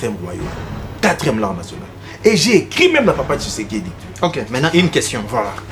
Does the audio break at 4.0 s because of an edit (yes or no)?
yes